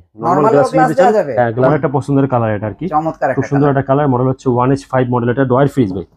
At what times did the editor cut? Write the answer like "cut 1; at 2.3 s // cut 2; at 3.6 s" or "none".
cut 1; at 1.7 s

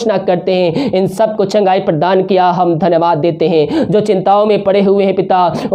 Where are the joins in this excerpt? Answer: none

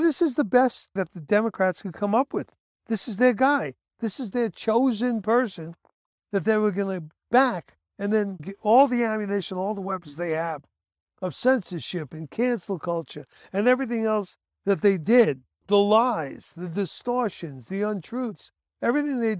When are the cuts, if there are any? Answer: cut 1; at 1.1 s // cut 2; at 8.3 s // cut 3; at 15.5 s

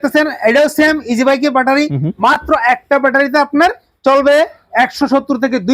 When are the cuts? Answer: none

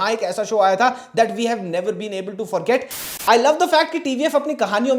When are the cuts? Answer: cut 1; at 3.0 s

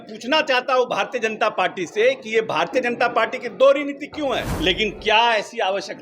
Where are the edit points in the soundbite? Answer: cut 1; at 4.5 s

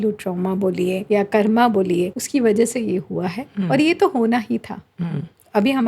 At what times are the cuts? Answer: cut 1; at 1.0 s // cut 2; at 2.2 s

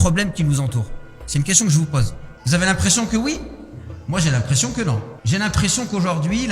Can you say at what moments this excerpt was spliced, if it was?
cut 1; at 5.1 s

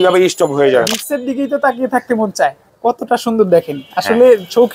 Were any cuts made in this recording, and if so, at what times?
cut 1; at 0.9 s // cut 2; at 2.6 s

